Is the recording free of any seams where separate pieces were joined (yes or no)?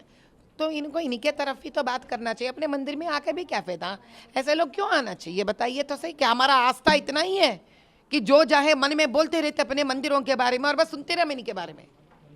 yes